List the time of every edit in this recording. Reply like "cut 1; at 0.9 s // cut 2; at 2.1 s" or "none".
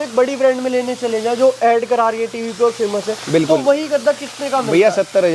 none